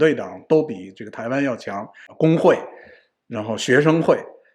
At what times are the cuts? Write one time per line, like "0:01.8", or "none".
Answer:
0:02.0